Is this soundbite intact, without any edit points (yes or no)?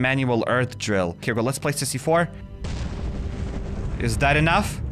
no